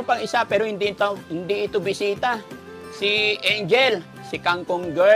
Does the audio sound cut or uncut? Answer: uncut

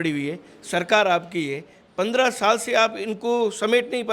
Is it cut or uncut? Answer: uncut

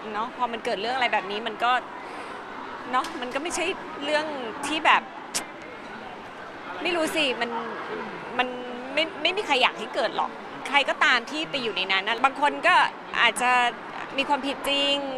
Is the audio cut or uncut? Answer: cut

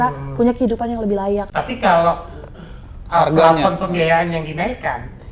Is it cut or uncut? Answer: cut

